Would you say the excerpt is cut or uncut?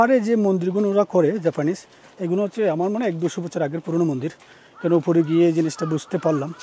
uncut